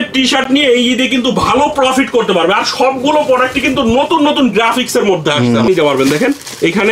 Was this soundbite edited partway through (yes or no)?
yes